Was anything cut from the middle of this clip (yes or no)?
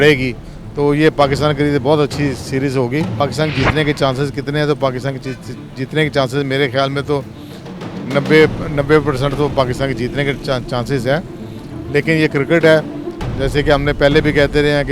yes